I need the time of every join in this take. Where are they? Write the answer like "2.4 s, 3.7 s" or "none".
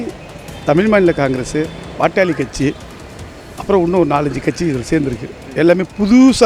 none